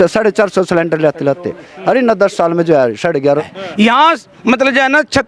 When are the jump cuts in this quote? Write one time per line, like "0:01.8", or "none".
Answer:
0:03.4